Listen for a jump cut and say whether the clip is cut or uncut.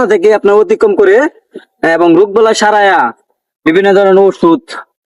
uncut